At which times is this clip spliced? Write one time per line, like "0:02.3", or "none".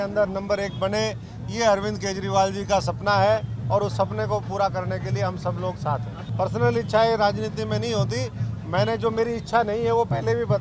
0:06.2